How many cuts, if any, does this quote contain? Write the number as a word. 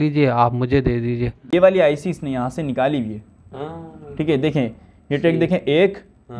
one